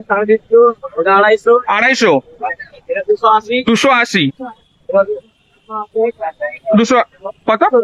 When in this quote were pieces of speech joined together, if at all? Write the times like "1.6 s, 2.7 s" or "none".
none